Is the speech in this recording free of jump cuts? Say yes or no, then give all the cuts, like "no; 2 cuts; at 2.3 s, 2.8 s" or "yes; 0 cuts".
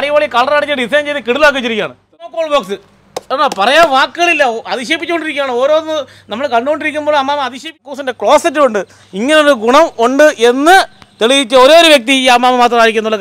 no; 2 cuts; at 2.3 s, 7.9 s